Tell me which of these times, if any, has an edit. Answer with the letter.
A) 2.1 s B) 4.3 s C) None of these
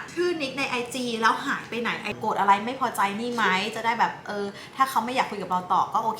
A